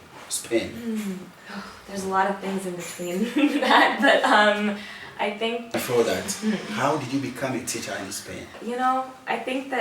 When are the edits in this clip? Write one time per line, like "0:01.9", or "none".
0:05.6
0:08.5